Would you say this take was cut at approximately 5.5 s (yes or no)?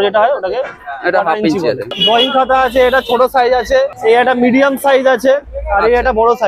no